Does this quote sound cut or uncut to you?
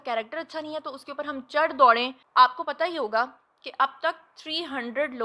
cut